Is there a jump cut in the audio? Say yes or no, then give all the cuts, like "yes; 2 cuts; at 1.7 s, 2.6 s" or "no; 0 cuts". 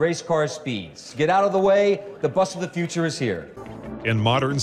yes; 2 cuts; at 1.0 s, 3.7 s